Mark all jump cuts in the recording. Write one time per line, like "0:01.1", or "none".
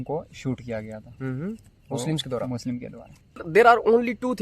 0:03.4